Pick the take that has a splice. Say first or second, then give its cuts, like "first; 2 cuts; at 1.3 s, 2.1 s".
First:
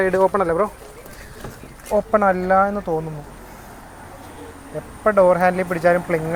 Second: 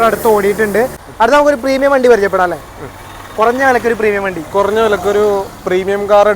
second; 1 cut; at 1.0 s